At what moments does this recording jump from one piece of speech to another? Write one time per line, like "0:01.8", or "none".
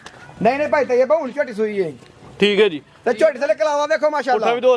none